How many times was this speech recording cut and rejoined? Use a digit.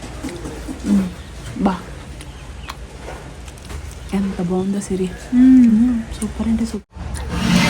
1